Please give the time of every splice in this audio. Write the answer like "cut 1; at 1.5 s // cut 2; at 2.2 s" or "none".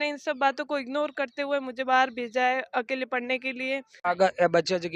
cut 1; at 3.9 s